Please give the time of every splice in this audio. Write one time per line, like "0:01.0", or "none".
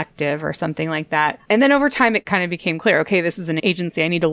0:01.4
0:02.2
0:03.6